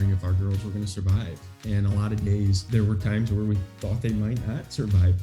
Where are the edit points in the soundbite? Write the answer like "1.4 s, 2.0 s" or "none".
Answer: 2.6 s

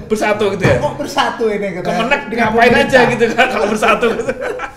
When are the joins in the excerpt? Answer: none

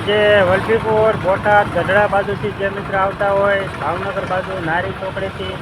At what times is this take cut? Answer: none

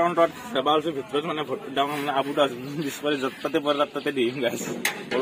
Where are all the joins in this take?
none

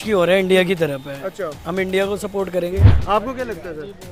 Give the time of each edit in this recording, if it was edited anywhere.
2.8 s

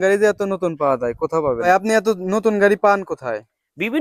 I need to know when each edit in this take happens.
1.7 s

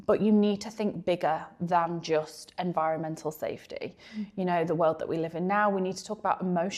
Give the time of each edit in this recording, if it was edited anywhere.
none

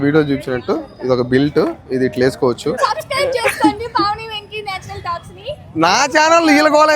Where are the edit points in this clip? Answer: 2.8 s

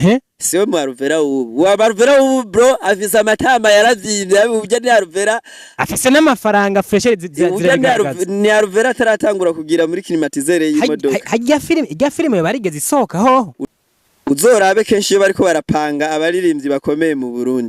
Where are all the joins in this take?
13.6 s

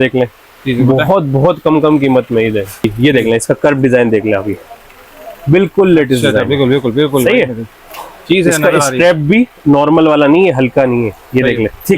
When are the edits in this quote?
2.9 s

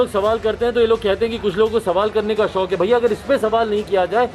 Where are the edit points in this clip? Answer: none

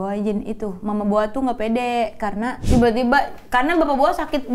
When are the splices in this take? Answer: 2.6 s

